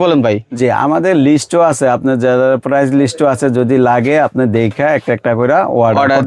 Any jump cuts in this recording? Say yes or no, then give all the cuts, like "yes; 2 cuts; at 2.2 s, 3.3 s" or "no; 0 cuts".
no; 0 cuts